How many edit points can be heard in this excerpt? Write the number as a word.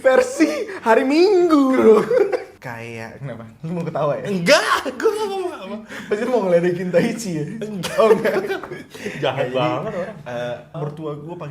two